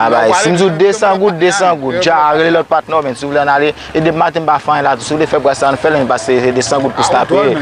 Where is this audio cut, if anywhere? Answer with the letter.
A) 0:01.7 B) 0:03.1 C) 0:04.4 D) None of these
D